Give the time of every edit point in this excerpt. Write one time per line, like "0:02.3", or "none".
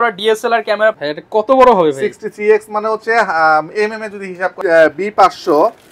0:01.0
0:04.5